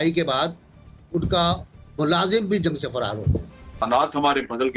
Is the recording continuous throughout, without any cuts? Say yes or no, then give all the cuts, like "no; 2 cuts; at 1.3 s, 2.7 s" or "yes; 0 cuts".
no; 1 cut; at 3.8 s